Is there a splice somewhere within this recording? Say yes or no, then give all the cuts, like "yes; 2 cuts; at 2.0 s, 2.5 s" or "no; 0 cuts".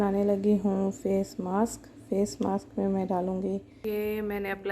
yes; 1 cut; at 3.7 s